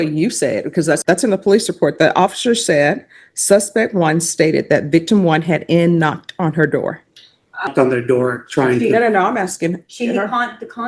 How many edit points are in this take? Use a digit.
2